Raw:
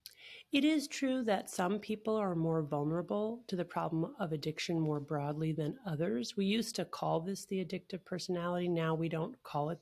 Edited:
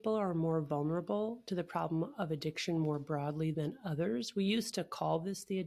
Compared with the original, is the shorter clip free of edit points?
yes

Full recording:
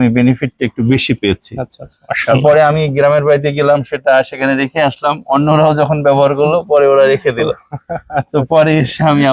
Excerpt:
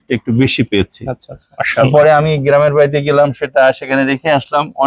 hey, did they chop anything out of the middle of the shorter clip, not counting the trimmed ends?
no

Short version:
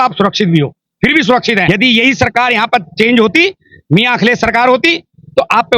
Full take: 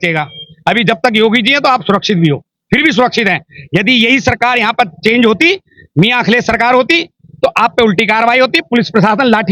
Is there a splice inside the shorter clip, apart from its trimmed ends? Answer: yes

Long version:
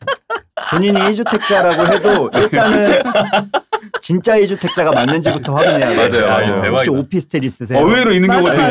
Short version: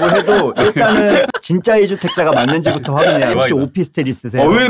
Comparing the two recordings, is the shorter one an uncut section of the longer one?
no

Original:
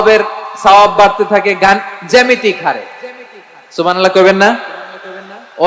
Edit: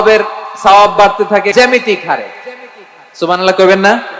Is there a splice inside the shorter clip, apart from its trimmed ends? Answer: yes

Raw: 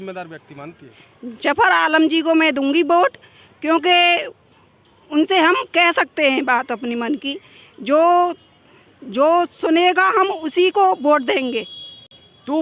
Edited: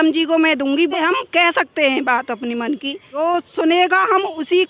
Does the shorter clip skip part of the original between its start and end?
yes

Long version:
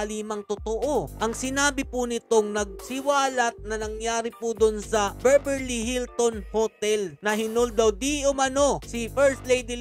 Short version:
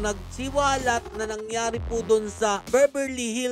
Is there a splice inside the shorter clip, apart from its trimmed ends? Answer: no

